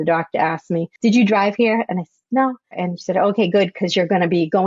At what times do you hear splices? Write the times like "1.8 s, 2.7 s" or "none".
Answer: 0.9 s, 2.8 s